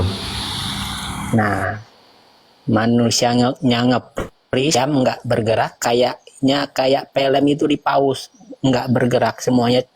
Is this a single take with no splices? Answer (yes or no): yes